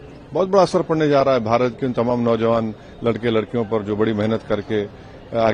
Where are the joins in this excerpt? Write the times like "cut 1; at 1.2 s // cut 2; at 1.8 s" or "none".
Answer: none